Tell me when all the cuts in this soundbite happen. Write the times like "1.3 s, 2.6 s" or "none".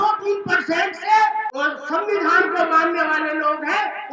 1.5 s